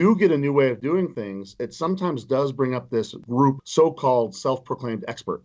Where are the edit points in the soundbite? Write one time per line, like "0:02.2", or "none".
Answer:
0:03.2